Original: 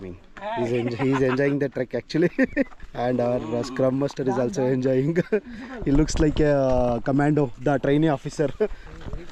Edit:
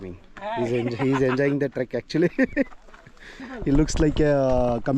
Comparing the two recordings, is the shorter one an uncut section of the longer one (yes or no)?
no